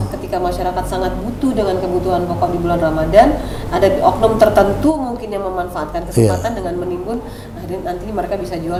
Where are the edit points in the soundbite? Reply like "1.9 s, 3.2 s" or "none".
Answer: none

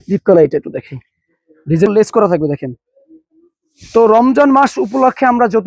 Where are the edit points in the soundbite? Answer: 1.9 s

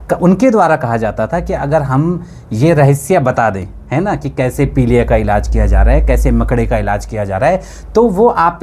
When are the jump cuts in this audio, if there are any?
none

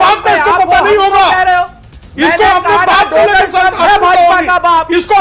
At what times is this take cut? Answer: none

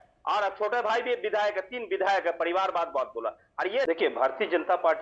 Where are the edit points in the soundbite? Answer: 3.9 s

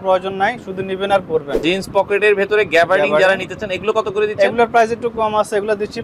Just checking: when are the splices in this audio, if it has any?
1.5 s

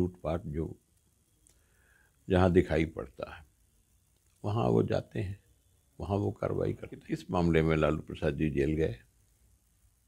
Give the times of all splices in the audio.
7.1 s

